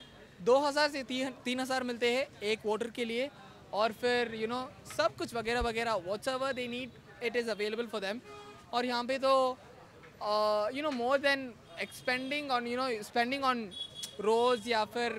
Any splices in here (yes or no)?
no